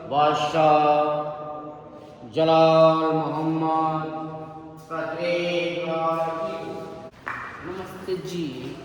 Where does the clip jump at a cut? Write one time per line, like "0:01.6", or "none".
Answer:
0:07.0